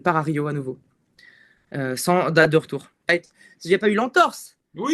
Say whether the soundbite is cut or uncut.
cut